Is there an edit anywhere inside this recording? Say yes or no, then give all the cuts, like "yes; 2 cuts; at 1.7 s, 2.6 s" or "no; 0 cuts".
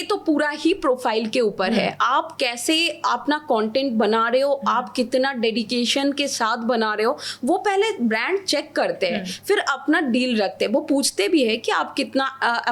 no; 0 cuts